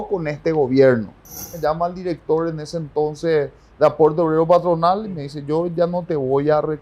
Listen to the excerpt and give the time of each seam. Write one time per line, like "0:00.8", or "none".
0:01.5